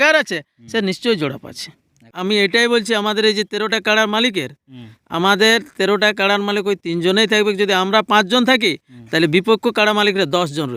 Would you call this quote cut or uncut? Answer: cut